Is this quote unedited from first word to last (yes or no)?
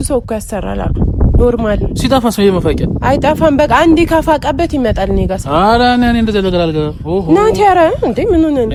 yes